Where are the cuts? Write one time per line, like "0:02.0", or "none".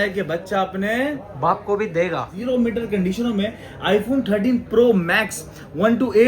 0:02.3

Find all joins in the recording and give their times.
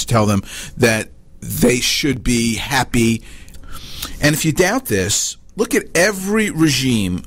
0:03.4

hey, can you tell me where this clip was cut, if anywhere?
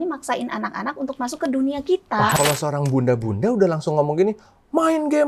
0:02.4

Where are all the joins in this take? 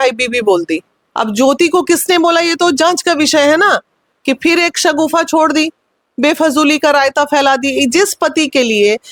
none

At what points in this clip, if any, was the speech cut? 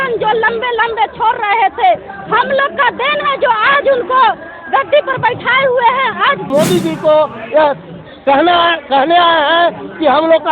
0:06.5

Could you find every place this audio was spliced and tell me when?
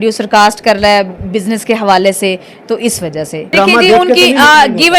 none

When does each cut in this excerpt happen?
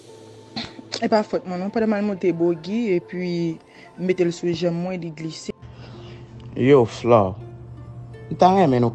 0:05.5

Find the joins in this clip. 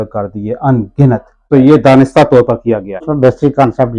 0:01.4
0:03.0

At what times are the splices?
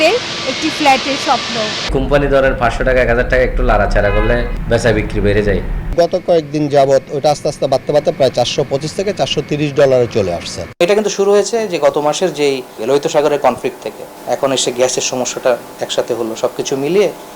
0:01.9
0:04.5
0:05.9
0:10.8
0:12.7
0:14.0

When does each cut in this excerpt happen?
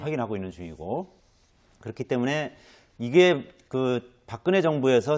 0:02.2

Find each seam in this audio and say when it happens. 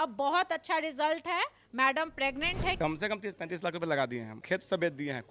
0:02.8
0:04.3

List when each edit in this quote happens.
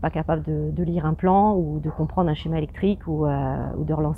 none

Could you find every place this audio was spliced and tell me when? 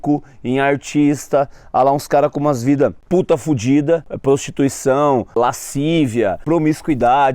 0:03.0
0:04.1
0:05.4
0:06.4

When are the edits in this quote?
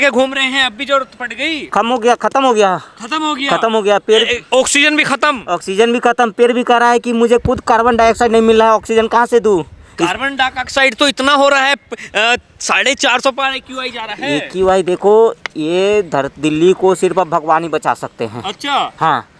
none

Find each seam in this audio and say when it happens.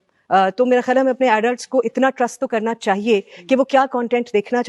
none

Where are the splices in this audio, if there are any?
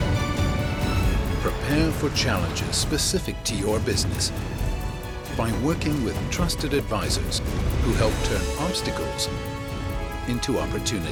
none

